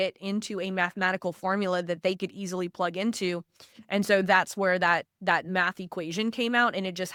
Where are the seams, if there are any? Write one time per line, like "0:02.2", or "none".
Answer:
none